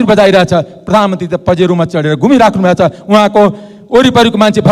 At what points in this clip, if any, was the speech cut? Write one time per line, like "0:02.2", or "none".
none